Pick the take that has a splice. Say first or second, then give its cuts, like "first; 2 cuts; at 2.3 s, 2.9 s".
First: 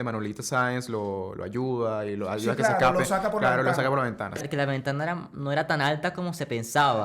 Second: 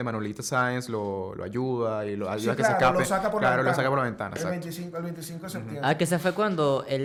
first; 1 cut; at 4.4 s